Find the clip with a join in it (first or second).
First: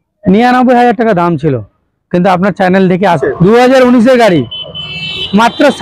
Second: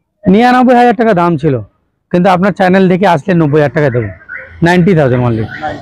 first